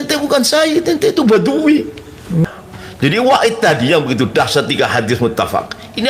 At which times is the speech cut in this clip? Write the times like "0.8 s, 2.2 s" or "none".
2.5 s